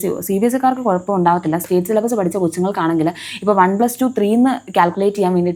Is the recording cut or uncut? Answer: uncut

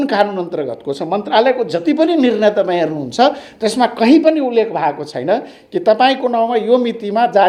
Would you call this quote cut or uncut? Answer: uncut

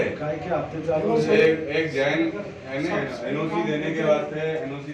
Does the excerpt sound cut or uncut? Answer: uncut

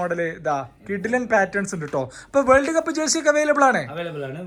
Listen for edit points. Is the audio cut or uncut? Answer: uncut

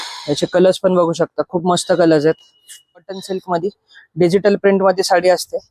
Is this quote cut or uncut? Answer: cut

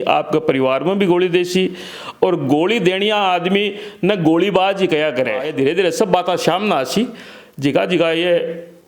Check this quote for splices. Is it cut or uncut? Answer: cut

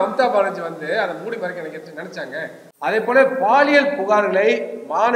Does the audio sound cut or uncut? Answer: cut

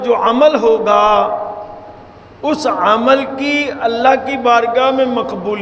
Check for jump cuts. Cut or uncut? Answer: uncut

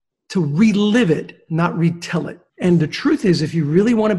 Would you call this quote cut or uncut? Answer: cut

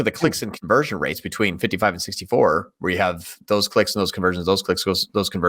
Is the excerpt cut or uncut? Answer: uncut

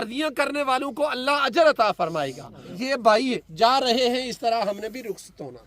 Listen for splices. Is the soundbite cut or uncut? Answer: cut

